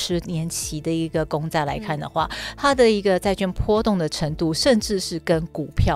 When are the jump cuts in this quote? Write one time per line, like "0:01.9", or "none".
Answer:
none